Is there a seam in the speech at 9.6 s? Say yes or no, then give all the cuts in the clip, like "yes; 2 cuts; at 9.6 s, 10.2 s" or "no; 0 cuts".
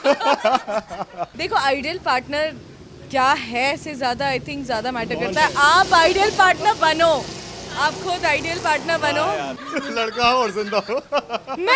yes; 2 cuts; at 1.4 s, 9.6 s